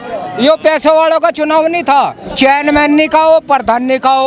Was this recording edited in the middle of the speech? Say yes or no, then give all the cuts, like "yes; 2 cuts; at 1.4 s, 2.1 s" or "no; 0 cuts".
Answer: yes; 1 cut; at 2.2 s